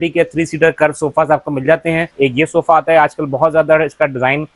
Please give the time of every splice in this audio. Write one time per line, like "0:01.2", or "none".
0:02.1

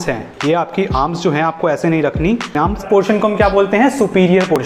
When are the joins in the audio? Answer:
0:02.8

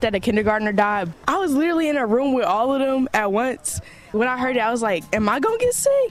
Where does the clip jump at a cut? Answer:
0:01.1
0:04.1
0:05.0

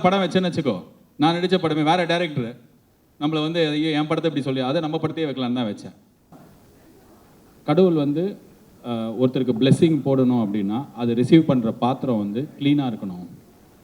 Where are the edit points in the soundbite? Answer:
0:06.3

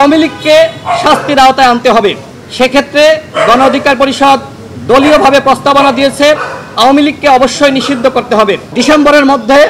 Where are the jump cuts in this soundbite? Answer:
0:08.7

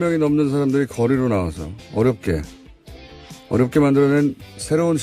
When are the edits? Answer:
0:01.1

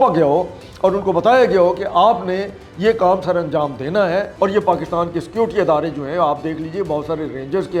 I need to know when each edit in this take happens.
0:04.3

